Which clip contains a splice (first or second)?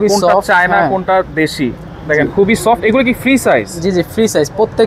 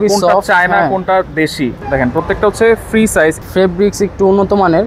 second